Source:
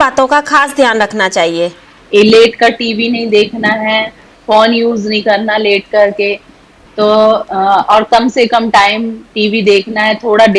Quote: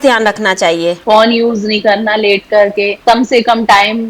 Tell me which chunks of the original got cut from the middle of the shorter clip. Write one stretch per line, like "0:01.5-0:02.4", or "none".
0:01.7-0:04.4
0:06.4-0:08.1